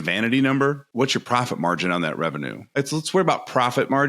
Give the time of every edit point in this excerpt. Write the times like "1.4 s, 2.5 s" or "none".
0.8 s, 2.6 s